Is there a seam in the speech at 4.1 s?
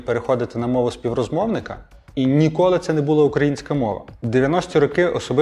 yes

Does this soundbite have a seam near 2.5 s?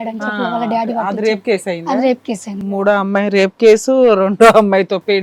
yes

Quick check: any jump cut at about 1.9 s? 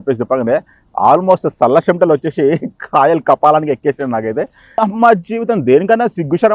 no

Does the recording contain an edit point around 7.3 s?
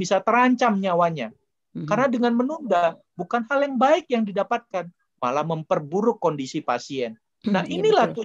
yes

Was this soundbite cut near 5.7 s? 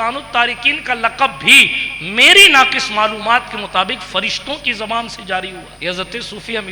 yes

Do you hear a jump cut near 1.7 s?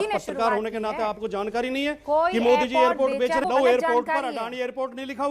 no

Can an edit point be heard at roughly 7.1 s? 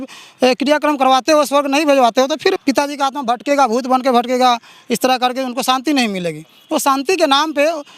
no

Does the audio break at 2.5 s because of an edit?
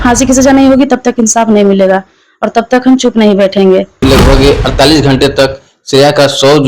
no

